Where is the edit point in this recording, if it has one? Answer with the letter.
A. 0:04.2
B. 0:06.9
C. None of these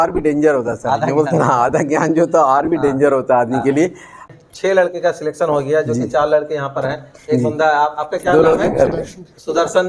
A